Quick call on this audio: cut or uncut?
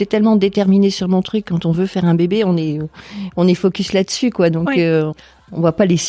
cut